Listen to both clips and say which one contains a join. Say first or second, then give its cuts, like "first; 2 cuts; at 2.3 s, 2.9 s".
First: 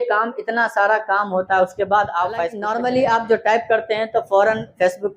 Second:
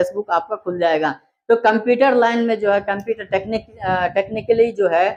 first; 1 cut; at 2.6 s